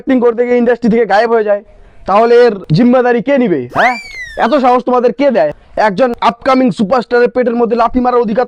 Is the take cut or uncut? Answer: cut